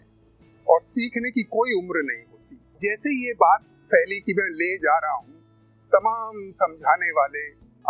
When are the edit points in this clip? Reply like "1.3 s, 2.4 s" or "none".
2.8 s